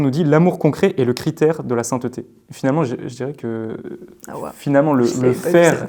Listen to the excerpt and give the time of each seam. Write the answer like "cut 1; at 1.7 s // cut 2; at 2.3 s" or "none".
none